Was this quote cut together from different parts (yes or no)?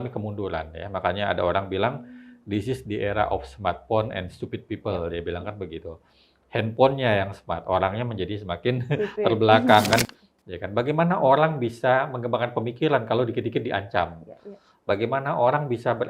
yes